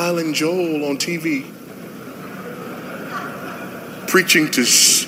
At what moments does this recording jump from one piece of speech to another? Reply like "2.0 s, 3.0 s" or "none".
1.5 s